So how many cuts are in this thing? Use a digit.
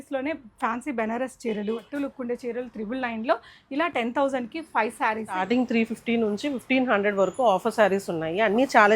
2